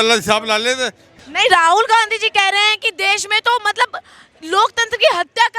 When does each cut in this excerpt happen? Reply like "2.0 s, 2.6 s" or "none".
1.2 s